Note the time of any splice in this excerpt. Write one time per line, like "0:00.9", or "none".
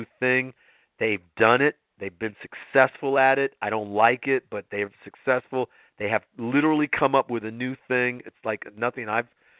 none